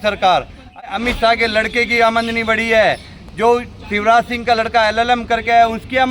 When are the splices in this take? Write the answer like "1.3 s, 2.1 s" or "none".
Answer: 0.9 s